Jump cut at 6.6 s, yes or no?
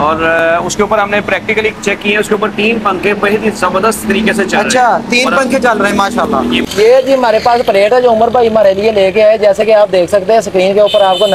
yes